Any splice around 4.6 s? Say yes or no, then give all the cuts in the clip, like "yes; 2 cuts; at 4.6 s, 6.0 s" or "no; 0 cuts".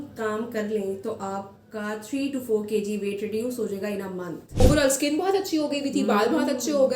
yes; 1 cut; at 4.6 s